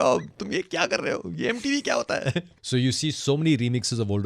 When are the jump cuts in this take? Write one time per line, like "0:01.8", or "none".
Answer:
0:02.5